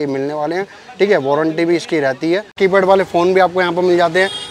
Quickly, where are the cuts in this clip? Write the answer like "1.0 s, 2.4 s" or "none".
2.6 s